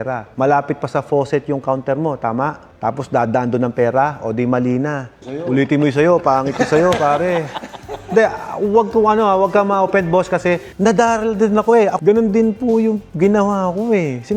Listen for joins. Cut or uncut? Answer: cut